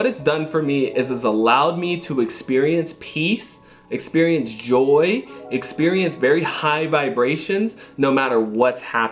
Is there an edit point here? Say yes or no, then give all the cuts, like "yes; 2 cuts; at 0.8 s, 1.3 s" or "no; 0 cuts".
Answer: no; 0 cuts